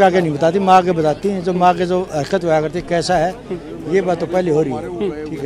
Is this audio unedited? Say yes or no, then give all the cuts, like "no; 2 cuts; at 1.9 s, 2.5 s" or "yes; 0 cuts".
yes; 0 cuts